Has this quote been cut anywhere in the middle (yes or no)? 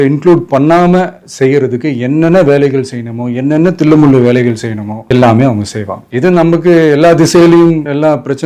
no